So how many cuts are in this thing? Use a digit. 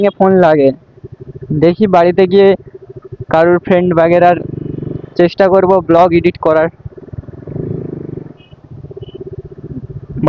0